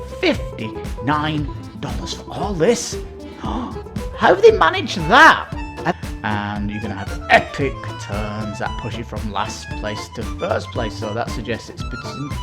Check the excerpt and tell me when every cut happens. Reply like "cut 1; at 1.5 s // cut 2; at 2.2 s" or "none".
cut 1; at 5.9 s